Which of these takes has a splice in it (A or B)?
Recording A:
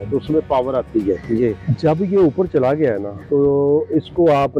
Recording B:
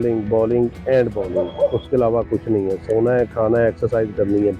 A